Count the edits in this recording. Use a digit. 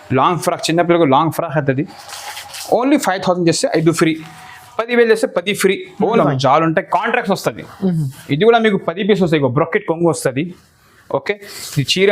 1